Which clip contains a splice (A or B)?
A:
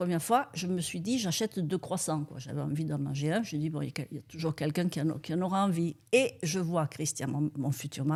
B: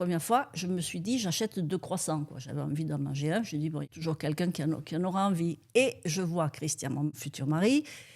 B